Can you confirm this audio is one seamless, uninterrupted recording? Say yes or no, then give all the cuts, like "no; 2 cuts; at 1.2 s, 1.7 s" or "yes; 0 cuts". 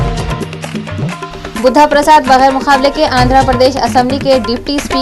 no; 1 cut; at 1.2 s